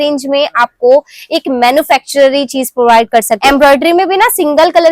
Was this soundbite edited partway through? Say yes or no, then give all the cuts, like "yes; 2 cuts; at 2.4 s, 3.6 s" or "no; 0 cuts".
yes; 1 cut; at 3.3 s